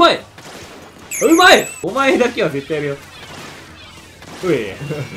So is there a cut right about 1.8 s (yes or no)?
yes